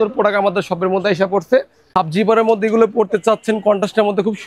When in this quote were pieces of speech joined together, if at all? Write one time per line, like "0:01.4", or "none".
0:01.9